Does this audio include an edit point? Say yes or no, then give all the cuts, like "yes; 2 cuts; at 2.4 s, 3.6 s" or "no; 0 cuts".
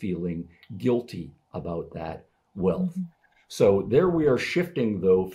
no; 0 cuts